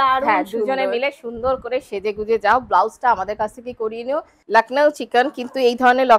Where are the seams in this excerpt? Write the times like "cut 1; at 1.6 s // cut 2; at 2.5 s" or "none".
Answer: cut 1; at 4.3 s